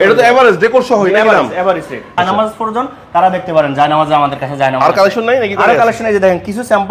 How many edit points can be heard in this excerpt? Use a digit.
1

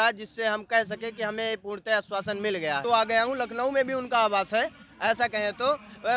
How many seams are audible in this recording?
1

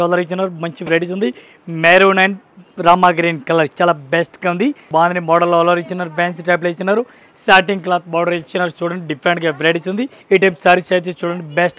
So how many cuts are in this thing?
2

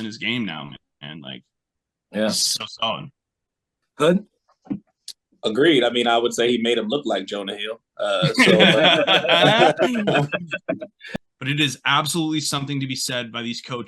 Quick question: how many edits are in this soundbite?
1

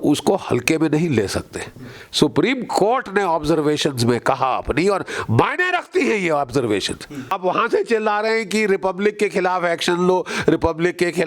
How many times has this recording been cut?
1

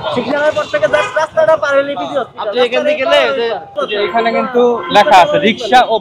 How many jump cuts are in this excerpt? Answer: 1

